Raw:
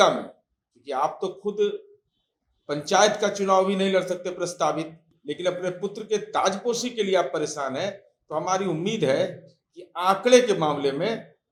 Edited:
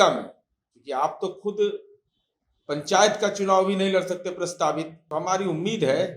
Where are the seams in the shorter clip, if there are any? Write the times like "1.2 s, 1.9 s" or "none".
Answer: 5.0 s